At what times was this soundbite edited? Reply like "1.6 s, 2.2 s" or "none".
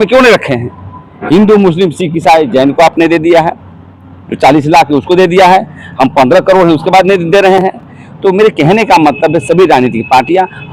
none